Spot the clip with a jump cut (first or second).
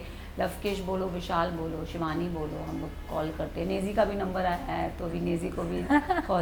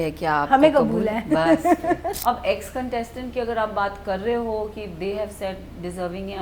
second